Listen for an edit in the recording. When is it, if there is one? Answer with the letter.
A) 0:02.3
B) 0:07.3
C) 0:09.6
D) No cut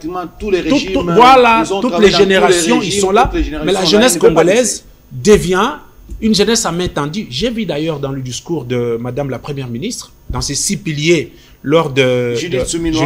D